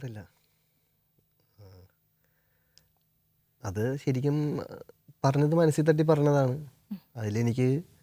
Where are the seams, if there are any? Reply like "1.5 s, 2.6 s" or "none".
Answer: none